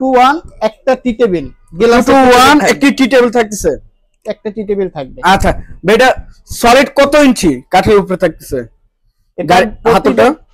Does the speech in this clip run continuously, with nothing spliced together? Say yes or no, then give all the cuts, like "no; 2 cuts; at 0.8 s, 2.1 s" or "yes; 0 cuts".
yes; 0 cuts